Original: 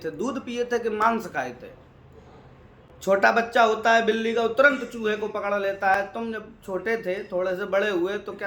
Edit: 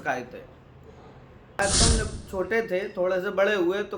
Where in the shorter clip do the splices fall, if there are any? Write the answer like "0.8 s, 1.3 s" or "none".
1.6 s